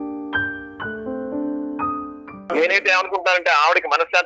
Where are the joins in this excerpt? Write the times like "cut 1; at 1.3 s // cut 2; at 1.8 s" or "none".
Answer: cut 1; at 2.3 s